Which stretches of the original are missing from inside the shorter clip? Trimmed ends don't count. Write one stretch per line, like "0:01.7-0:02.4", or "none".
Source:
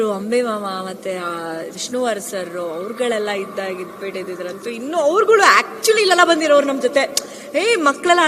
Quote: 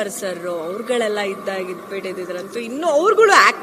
none